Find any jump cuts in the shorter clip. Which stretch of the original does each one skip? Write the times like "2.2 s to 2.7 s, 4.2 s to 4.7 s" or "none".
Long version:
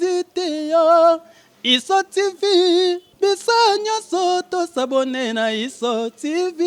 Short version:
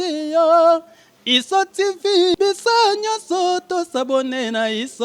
2.7 s to 3.2 s